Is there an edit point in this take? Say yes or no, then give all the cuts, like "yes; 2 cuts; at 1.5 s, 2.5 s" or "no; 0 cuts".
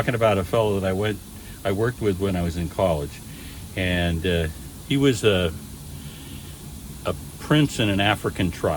no; 0 cuts